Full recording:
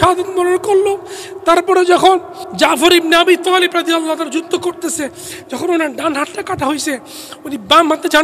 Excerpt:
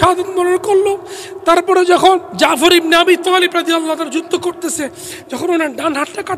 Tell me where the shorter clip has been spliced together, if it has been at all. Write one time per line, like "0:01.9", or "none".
0:02.3